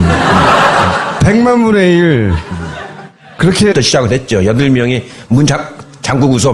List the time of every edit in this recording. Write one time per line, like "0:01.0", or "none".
none